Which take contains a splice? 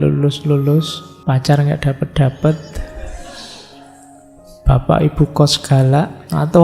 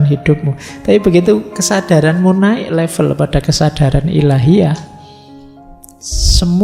first; 1 cut; at 1.0 s

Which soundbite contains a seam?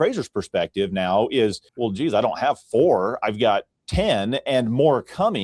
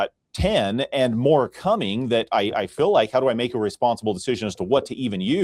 first; 1 cut; at 1.7 s

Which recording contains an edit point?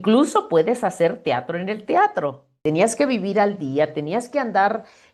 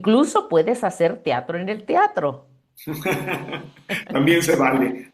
first; 1 cut; at 2.6 s

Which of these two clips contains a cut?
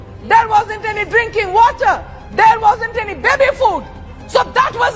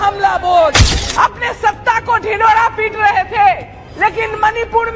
second; 1 cut; at 0.9 s

